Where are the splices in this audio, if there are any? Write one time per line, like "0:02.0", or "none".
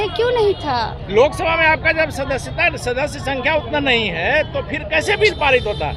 none